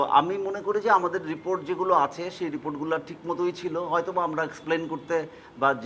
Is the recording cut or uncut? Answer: uncut